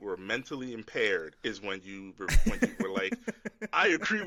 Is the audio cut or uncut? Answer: uncut